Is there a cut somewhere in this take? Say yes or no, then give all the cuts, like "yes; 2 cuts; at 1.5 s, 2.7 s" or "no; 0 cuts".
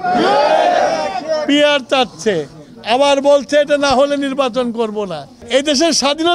yes; 1 cut; at 5.4 s